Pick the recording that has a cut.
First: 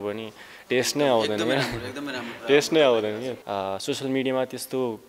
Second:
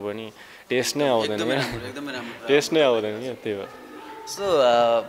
first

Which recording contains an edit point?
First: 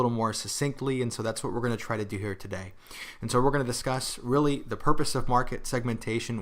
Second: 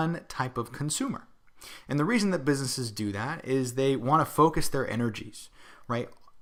first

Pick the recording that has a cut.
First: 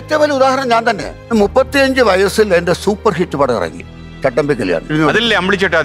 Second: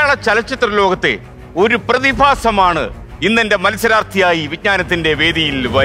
first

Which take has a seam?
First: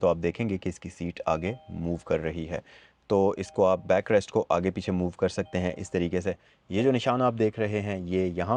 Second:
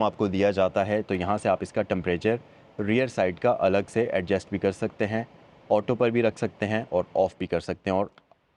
first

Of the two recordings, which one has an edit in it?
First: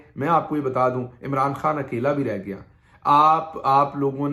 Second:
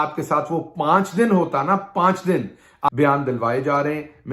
second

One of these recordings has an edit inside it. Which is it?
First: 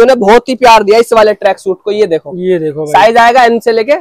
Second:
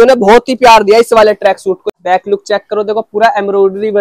second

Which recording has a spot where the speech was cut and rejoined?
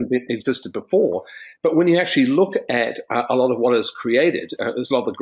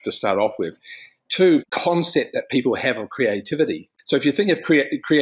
second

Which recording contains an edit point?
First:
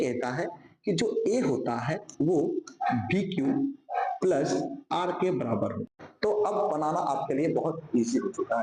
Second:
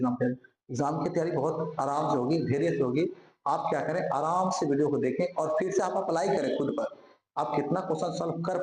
first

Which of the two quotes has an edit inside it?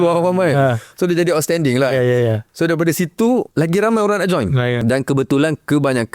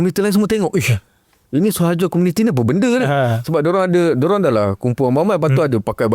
first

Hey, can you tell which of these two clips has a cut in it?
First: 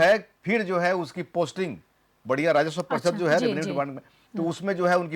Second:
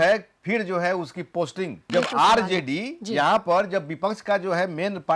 second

